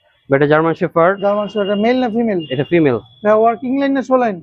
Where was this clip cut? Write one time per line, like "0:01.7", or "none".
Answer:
none

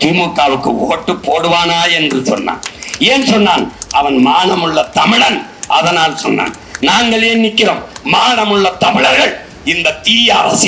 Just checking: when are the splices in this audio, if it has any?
none

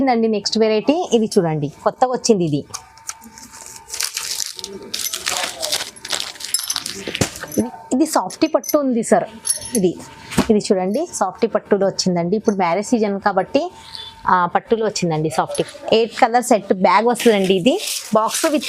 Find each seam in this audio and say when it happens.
0:07.4
0:15.6

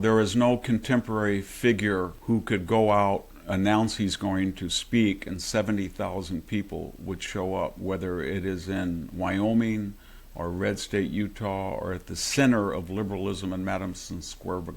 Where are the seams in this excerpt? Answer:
0:02.2

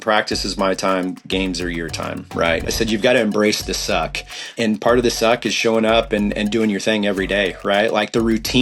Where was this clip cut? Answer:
0:02.6
0:04.5

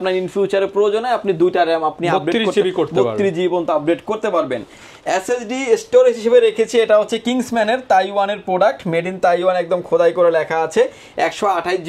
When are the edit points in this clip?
none

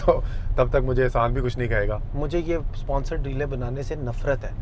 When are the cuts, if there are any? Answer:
0:02.0

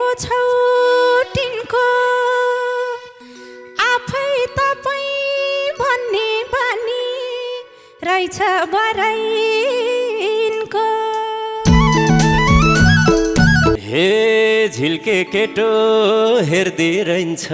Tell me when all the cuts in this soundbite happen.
0:13.8

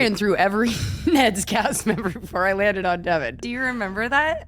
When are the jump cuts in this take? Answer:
0:03.4

